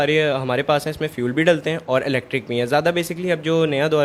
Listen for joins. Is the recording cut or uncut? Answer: uncut